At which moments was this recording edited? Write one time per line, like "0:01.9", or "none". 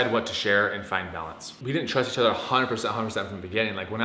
0:01.5